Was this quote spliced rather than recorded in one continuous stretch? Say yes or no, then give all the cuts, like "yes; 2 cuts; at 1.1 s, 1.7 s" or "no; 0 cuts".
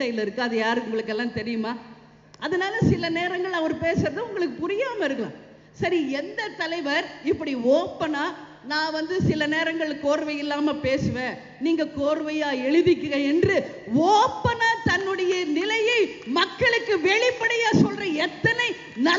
no; 0 cuts